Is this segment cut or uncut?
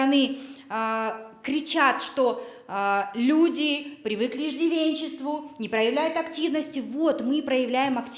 uncut